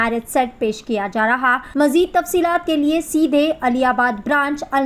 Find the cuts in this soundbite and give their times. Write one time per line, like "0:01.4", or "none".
0:01.6